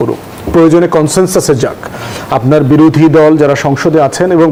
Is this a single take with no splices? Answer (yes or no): yes